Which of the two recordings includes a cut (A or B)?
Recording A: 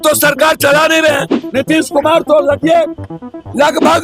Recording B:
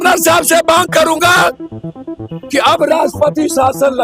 A